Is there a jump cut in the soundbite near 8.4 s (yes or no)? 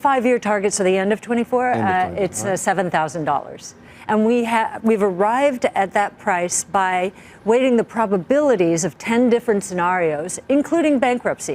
no